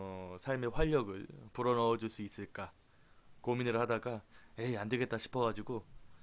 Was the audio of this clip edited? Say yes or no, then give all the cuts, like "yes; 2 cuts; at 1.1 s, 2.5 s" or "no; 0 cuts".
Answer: yes; 1 cut; at 2.7 s